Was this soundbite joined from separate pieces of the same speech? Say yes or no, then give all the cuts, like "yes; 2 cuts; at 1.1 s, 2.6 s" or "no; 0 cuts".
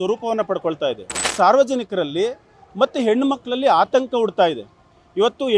yes; 1 cut; at 1.2 s